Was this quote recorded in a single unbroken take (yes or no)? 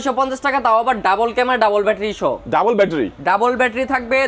yes